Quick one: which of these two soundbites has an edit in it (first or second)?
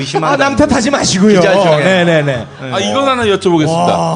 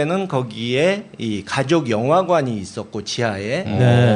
second